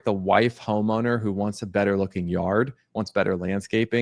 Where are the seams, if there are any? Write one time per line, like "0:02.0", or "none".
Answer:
none